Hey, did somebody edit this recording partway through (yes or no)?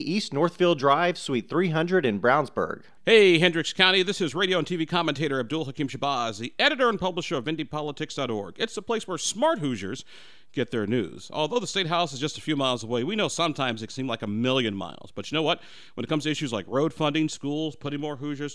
yes